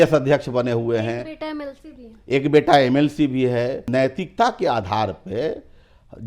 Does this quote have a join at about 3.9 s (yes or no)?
yes